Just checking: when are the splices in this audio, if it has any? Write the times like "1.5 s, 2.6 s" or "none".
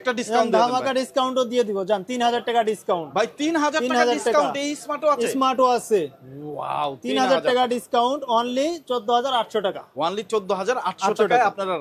none